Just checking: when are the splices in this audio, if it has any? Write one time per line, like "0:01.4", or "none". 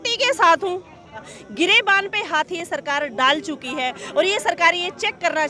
0:01.4